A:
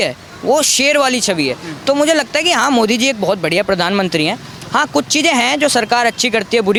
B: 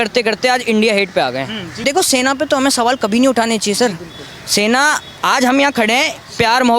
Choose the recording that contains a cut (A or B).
B